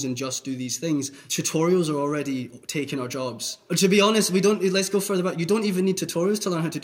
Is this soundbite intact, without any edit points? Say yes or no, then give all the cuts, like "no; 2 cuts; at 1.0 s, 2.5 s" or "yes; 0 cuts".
no; 2 cuts; at 1.2 s, 3.4 s